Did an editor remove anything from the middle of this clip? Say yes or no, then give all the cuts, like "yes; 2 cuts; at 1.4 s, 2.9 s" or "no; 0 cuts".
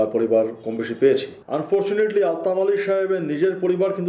yes; 1 cut; at 1.4 s